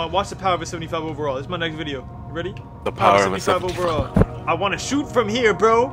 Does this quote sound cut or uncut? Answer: cut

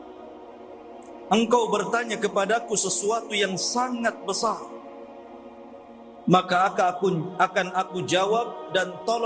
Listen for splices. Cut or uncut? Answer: cut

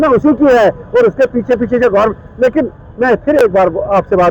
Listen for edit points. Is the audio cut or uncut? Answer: uncut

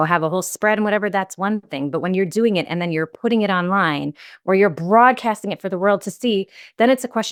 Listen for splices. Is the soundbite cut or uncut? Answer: uncut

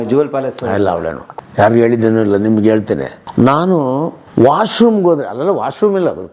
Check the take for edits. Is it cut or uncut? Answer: cut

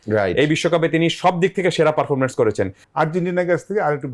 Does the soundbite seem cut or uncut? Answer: cut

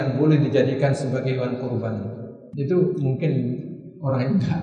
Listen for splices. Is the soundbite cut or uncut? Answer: cut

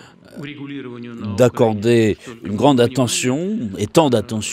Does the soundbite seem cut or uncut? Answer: uncut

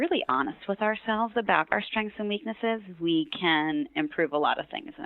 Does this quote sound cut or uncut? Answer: uncut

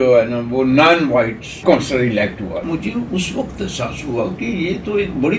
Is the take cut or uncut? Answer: cut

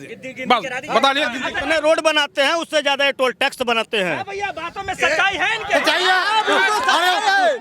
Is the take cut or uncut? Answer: cut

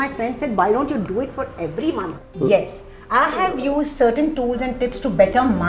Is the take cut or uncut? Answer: cut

